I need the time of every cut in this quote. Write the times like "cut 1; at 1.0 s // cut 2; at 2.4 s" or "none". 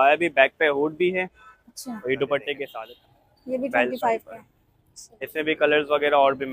cut 1; at 2.7 s